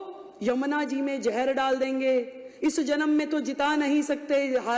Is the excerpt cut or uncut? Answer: uncut